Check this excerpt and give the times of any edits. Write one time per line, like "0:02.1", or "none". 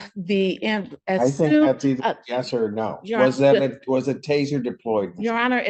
none